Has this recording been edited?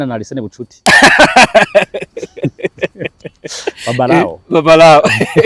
no; 0 cuts

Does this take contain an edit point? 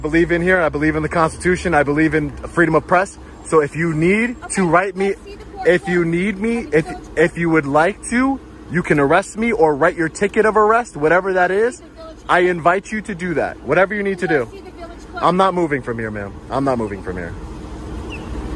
no; 0 cuts

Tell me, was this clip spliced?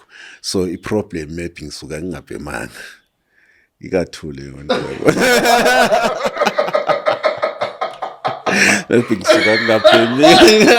no; 0 cuts

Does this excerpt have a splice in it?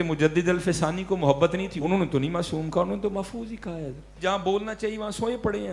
yes; 2 cuts; at 1.7 s, 4.1 s

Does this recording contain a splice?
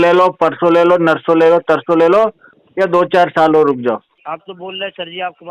yes; 1 cut; at 4.1 s

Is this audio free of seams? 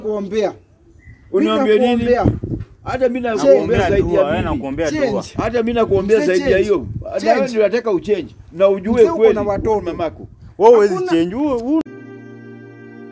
no; 1 cut; at 11.8 s

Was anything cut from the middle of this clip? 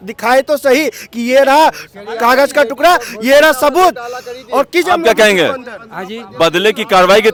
no; 0 cuts

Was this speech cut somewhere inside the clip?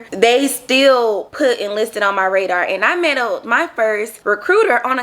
yes; 2 cuts; at 1.3 s, 4.1 s

